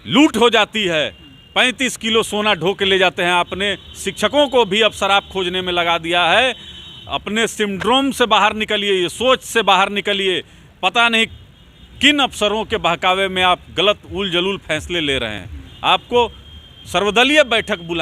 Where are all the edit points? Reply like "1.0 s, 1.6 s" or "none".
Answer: none